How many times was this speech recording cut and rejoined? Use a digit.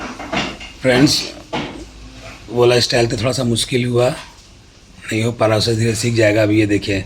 0